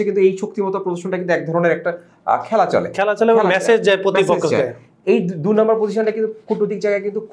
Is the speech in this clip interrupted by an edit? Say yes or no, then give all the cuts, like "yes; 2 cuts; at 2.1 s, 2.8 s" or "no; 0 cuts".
no; 0 cuts